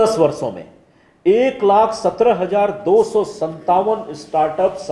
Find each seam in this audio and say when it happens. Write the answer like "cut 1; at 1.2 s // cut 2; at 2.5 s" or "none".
none